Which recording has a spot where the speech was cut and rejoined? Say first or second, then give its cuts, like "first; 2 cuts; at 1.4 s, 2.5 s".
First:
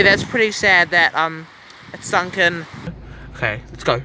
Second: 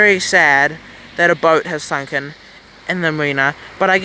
first; 1 cut; at 2.9 s